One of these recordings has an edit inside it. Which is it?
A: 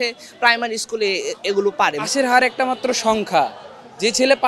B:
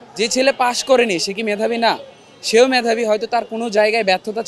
A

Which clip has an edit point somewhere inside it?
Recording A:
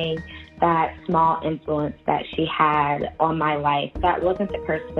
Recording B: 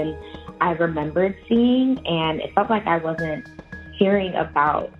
A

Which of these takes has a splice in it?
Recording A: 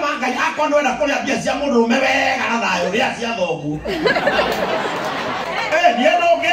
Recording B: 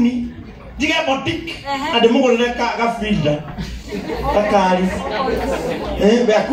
A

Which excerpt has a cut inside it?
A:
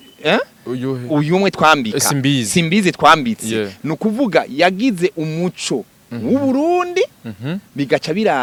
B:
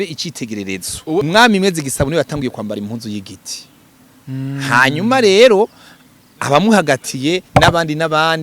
B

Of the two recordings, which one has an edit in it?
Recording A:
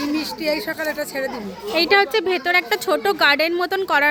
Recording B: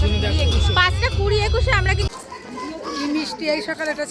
B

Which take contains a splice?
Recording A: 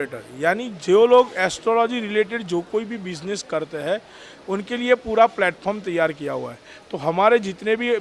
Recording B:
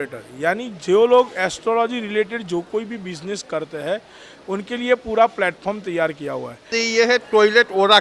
B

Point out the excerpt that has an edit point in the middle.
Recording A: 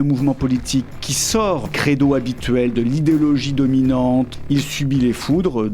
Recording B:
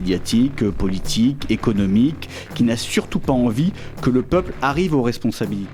A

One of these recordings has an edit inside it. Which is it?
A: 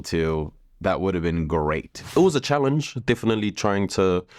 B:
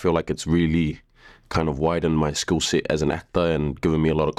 A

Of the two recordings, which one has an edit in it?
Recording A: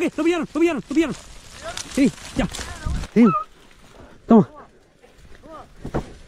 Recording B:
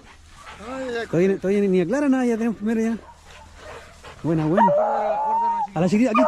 A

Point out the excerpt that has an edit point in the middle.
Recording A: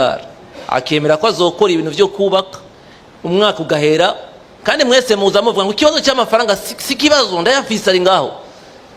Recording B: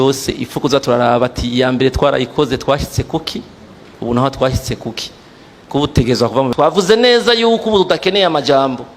B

